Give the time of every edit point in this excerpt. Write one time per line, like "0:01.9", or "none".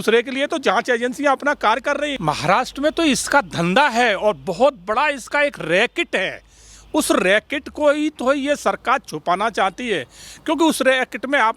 0:02.1